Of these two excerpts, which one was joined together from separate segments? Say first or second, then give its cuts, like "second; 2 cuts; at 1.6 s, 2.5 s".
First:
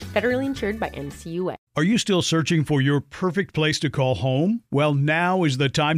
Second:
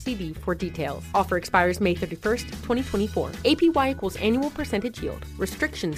first; 1 cut; at 1.6 s